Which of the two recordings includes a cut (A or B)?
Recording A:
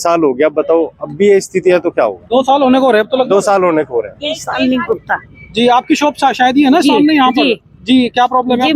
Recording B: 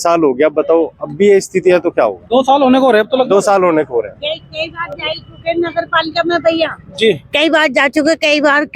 A